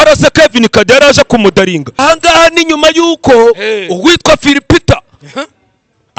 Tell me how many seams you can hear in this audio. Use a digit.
1